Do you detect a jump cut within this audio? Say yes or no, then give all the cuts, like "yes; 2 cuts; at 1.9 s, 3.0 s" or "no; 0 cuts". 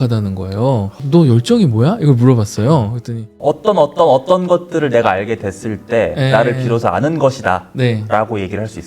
yes; 2 cuts; at 1.0 s, 3.3 s